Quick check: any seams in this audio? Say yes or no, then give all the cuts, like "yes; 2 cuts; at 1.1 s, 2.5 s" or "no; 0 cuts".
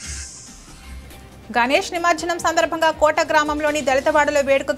no; 0 cuts